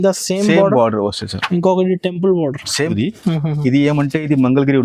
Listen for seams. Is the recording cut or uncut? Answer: cut